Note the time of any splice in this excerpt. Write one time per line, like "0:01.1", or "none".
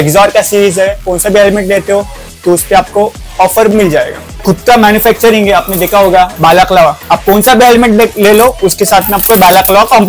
0:01.1
0:04.4
0:06.3
0:07.0